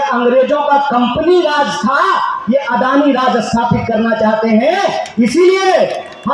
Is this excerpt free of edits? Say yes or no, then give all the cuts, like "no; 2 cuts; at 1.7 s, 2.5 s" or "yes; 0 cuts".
yes; 0 cuts